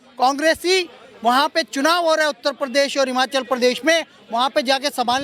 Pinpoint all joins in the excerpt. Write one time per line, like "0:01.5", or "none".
none